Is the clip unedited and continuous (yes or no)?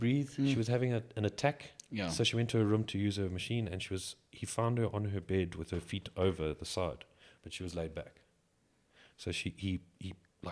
yes